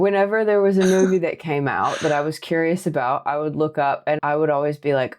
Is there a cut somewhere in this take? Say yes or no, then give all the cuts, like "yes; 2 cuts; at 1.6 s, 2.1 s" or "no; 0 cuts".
yes; 1 cut; at 4.2 s